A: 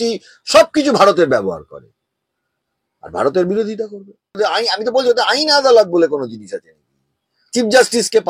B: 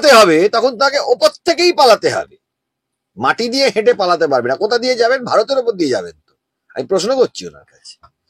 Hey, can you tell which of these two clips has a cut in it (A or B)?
A